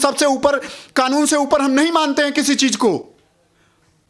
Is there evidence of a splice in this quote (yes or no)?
no